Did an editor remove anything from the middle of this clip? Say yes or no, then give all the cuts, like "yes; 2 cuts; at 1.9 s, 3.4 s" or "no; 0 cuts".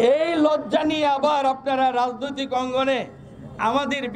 no; 0 cuts